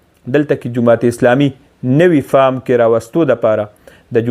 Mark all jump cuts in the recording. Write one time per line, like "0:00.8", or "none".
none